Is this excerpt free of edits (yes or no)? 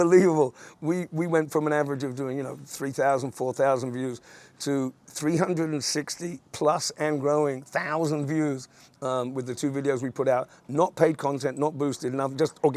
yes